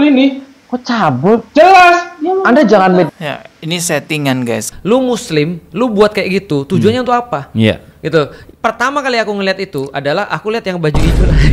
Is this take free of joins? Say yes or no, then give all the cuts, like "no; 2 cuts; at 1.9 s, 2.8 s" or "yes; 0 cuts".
no; 1 cut; at 4.7 s